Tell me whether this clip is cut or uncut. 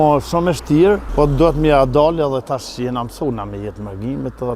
cut